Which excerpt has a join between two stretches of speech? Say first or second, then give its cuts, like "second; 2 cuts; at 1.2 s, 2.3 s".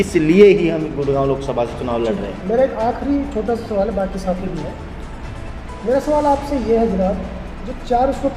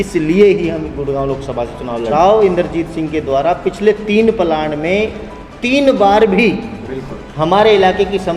second; 1 cut; at 2.1 s